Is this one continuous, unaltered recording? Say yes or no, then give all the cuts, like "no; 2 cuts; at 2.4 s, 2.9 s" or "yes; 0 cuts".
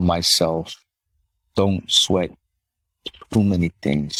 yes; 0 cuts